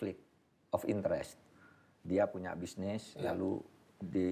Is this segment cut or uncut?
uncut